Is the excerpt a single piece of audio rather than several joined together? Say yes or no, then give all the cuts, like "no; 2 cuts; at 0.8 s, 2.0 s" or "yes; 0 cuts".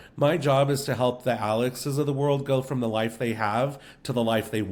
yes; 0 cuts